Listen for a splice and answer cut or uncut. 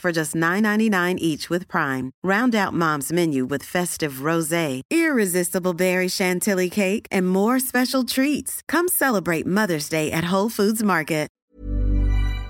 cut